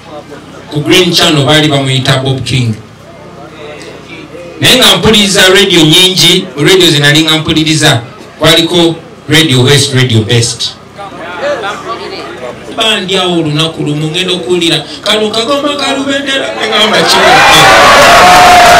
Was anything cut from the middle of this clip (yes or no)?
yes